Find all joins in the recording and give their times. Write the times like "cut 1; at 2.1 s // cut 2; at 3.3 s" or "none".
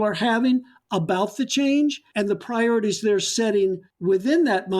cut 1; at 2.1 s // cut 2; at 3.9 s